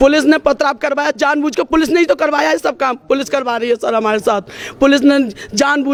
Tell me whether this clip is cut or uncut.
uncut